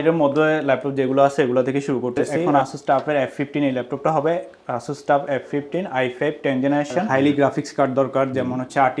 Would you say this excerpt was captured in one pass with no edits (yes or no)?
no